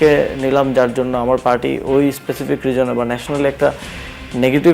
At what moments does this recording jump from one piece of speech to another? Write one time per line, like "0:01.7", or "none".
none